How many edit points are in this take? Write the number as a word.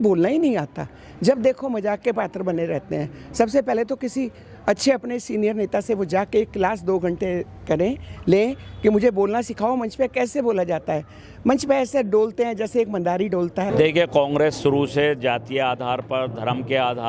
one